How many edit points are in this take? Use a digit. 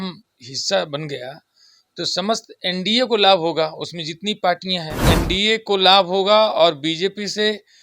1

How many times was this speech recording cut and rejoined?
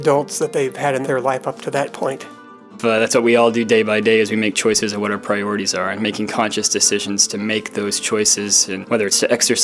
3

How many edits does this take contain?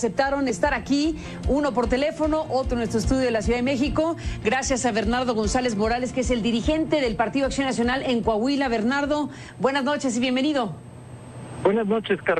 0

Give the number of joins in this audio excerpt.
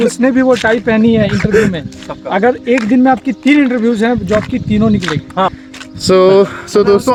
0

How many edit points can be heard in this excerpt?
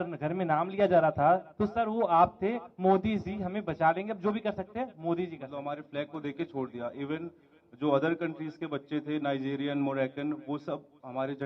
1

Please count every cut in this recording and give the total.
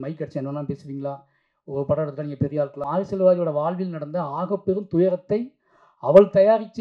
1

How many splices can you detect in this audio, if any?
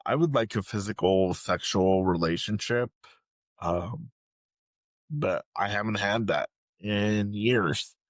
0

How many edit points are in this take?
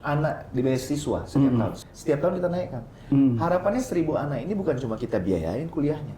1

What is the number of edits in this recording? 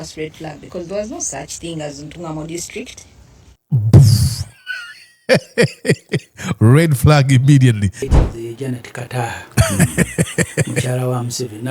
1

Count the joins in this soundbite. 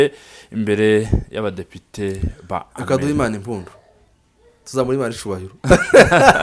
0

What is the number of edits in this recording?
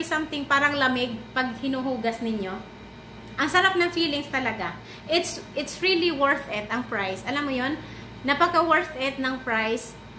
1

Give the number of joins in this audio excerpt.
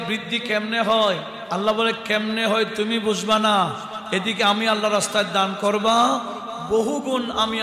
0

